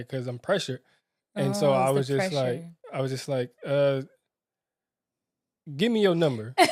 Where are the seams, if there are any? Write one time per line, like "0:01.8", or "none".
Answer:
none